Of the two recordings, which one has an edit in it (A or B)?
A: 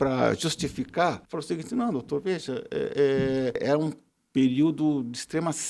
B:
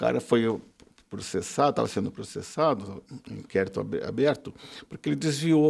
A